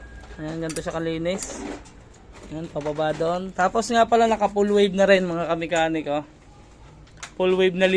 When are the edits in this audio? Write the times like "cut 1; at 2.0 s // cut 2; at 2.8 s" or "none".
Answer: none